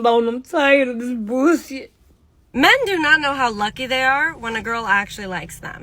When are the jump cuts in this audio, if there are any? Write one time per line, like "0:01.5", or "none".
0:02.5

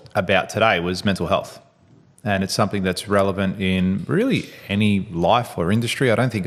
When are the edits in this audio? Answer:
none

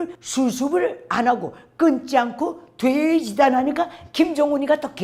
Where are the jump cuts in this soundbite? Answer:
none

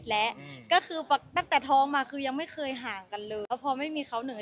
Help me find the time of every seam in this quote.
0:03.5

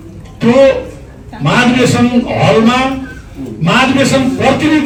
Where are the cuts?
none

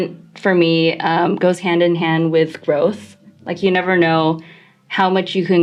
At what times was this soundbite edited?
none

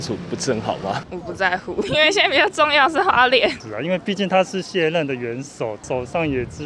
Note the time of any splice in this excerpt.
0:01.0
0:03.6

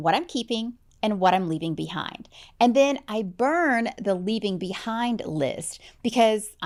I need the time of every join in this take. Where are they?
none

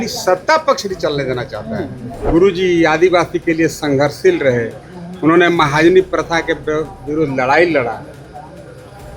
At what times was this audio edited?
0:02.3

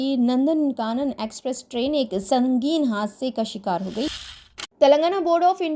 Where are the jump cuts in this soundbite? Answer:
0:04.1

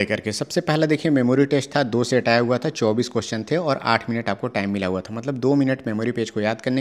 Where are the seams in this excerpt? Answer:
none

